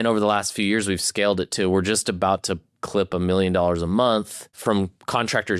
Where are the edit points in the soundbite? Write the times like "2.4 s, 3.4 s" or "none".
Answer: 4.6 s